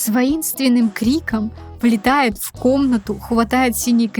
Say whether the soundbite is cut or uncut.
cut